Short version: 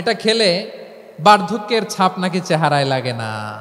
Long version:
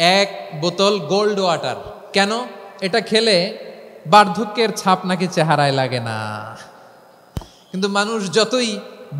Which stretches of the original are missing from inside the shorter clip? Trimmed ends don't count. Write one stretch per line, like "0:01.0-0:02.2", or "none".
none